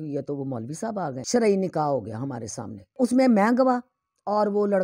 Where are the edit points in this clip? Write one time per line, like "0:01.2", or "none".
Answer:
0:01.2
0:02.9